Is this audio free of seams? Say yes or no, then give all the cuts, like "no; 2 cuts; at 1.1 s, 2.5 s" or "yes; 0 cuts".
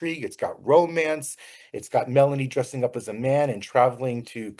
yes; 0 cuts